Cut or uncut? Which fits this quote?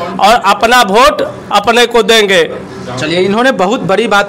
uncut